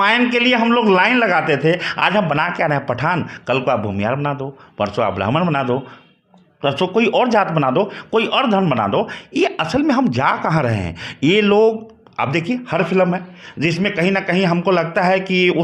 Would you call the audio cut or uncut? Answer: uncut